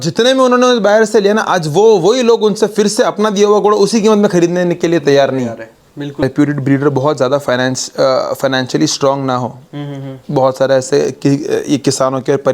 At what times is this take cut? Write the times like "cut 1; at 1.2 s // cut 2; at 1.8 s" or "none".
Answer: cut 1; at 6.2 s

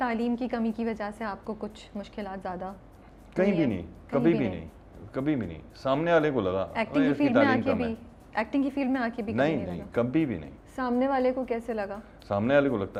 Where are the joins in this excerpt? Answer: none

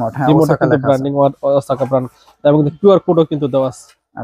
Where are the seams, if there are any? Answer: none

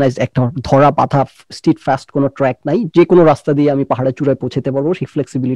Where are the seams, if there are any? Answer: none

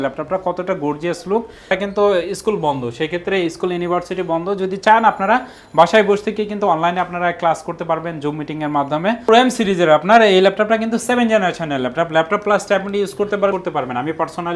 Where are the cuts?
cut 1; at 1.7 s // cut 2; at 9.3 s // cut 3; at 13.5 s

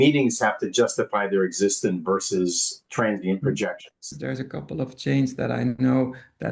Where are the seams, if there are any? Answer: cut 1; at 4.1 s

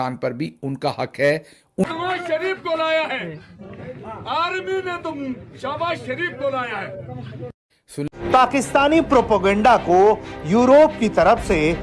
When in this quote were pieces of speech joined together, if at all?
cut 1; at 1.8 s // cut 2; at 8.1 s

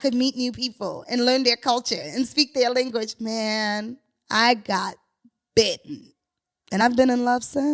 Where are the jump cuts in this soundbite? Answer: cut 1; at 6.8 s

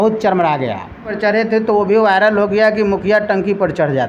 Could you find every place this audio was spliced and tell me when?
cut 1; at 1.1 s

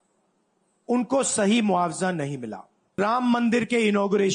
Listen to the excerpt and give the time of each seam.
cut 1; at 3.0 s

